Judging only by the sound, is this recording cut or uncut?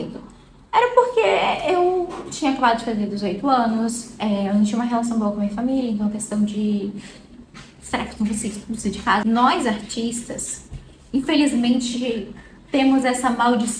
cut